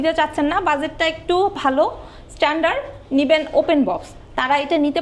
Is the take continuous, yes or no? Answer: yes